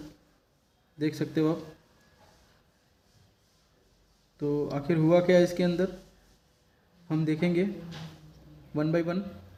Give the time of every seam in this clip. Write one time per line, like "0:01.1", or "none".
none